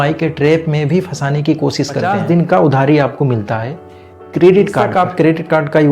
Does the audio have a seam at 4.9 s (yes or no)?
yes